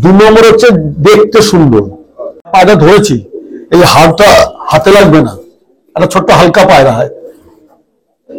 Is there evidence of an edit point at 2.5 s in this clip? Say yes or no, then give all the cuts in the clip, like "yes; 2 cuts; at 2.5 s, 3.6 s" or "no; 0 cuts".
yes; 1 cut; at 2.5 s